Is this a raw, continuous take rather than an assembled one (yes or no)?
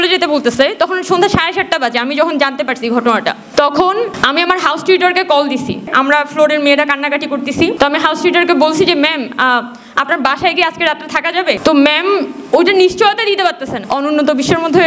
no